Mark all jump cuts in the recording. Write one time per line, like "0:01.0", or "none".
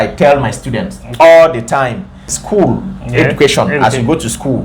0:02.3

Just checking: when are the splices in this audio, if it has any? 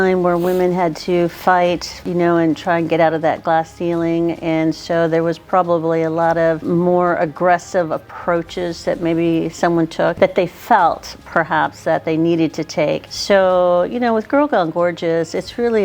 0:02.0
0:06.6
0:10.1
0:13.1

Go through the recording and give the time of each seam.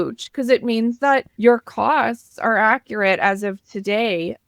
0:01.3

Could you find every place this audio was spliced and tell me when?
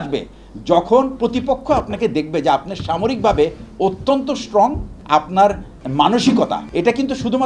0:04.9
0:05.8
0:06.6

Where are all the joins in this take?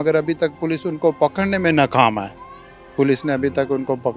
none

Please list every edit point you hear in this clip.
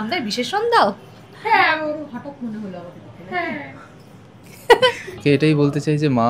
0:05.2

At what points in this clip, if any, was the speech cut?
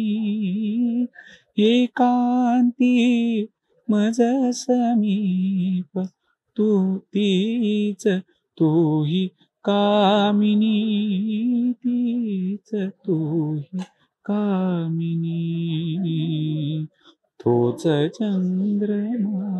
none

